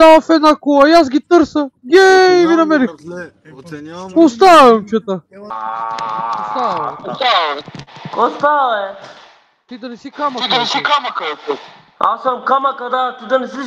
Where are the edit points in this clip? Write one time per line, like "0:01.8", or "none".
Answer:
0:05.4